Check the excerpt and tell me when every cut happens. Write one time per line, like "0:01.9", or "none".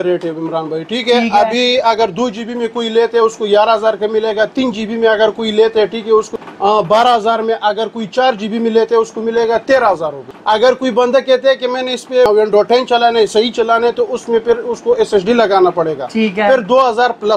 none